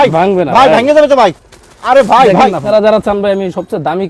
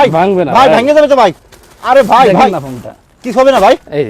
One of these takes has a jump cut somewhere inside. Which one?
first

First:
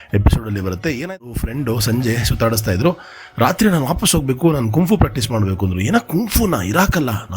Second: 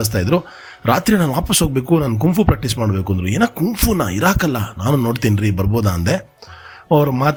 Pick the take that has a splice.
first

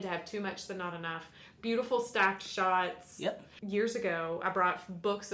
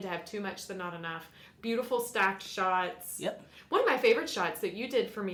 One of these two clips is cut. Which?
first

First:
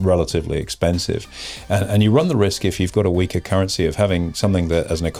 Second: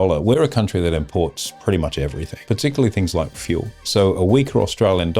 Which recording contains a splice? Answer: second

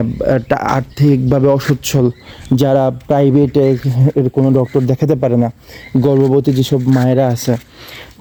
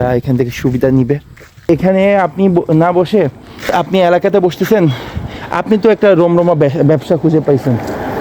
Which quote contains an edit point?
second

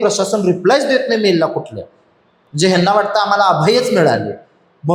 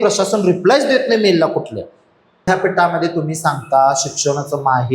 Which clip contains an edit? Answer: second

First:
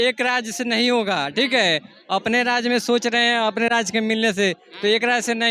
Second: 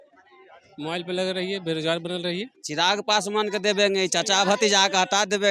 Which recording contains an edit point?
second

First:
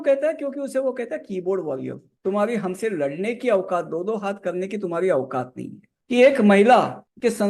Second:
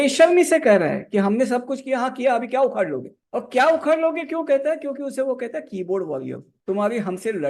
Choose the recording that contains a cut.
first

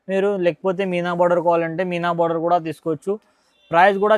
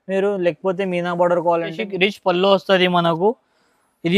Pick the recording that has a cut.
second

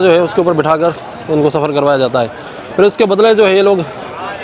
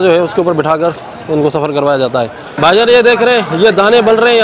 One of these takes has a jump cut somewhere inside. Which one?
second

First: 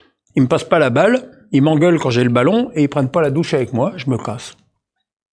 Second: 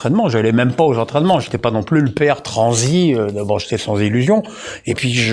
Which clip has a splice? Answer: first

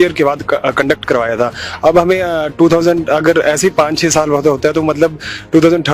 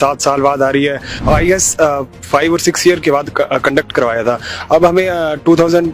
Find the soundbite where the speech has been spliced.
second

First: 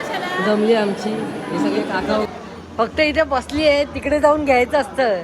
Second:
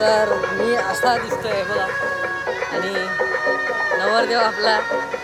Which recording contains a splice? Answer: first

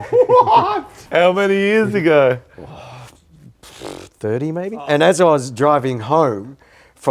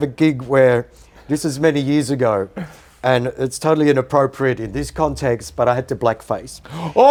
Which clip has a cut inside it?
first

